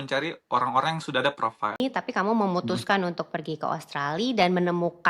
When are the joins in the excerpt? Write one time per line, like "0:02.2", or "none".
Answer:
0:01.8